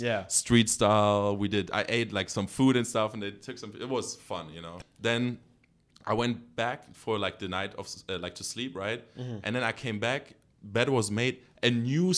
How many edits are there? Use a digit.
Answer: 1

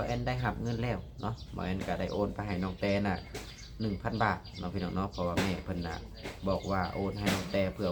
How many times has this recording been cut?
0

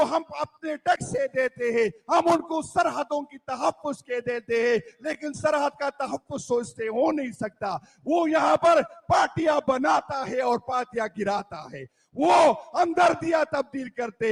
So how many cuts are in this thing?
0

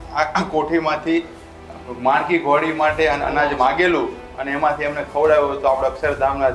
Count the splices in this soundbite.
0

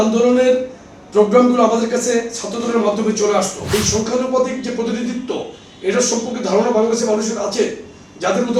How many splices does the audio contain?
1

